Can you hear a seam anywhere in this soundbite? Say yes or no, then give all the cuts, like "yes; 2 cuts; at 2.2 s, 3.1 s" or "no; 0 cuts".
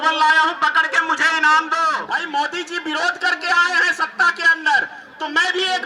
yes; 1 cut; at 2.0 s